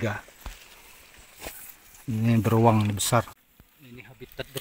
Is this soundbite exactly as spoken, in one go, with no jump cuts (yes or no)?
no